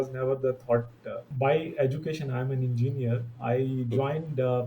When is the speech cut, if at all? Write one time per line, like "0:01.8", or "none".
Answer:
0:01.2